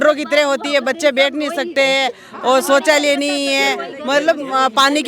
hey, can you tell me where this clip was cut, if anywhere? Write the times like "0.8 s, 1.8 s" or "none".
none